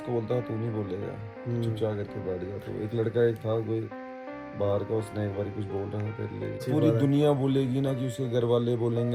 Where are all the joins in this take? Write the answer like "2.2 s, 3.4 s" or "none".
6.7 s